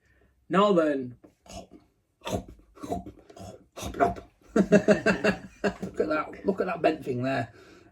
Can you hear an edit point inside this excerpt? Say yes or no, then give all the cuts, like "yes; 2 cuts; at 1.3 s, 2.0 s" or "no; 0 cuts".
yes; 1 cut; at 5.9 s